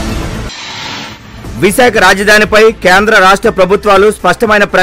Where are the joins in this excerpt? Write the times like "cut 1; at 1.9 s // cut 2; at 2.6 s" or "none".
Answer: none